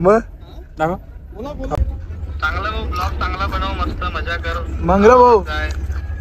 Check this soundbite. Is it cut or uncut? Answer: cut